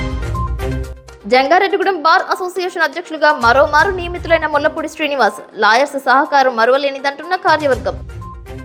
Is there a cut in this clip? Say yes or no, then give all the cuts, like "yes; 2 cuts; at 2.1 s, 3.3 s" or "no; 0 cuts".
no; 0 cuts